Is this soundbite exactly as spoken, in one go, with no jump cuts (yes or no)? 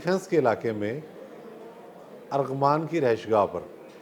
yes